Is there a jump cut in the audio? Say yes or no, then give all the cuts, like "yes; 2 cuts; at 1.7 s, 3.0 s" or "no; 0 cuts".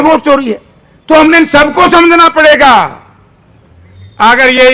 no; 0 cuts